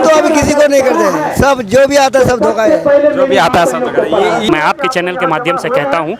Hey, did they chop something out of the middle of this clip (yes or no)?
yes